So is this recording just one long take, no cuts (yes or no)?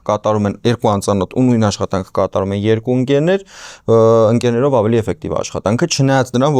yes